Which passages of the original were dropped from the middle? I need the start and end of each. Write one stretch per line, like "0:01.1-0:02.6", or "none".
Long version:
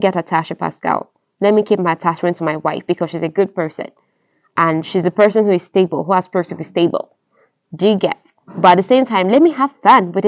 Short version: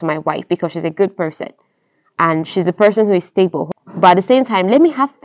0:06.0-0:08.2